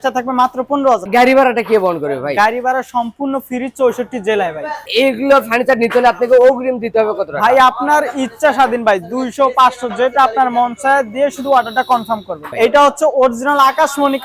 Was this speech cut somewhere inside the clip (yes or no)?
yes